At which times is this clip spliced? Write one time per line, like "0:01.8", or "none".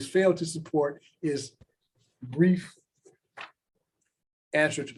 none